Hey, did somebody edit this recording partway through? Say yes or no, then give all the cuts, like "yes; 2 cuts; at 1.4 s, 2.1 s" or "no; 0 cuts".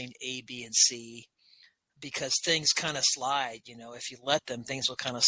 yes; 1 cut; at 1.8 s